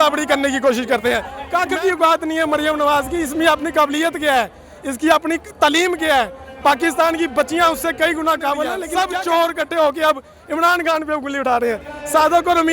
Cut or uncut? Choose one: cut